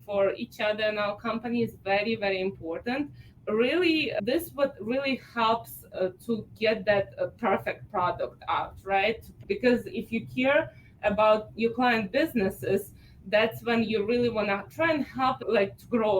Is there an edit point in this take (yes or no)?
yes